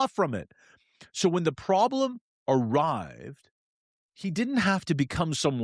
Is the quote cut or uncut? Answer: uncut